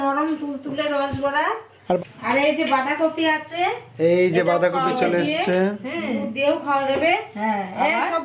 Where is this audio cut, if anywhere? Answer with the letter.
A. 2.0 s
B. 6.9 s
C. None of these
A